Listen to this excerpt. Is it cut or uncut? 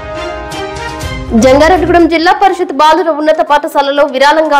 uncut